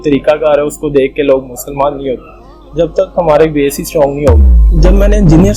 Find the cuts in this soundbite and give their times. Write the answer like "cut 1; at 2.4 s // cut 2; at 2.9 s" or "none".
cut 1; at 4.6 s